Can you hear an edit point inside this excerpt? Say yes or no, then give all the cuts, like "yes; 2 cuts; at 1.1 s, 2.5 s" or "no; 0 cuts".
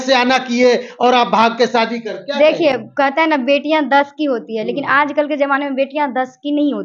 no; 0 cuts